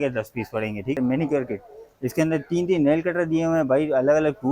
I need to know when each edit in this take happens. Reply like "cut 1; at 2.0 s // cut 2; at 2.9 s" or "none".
cut 1; at 1.0 s